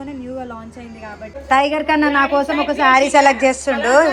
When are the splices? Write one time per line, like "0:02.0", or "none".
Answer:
0:01.4